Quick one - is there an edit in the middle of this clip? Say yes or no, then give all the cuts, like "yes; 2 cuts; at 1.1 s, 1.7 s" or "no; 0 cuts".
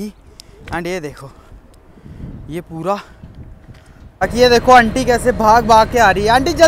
yes; 1 cut; at 4.3 s